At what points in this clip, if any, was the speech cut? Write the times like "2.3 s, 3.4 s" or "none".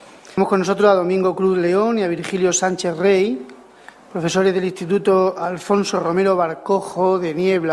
none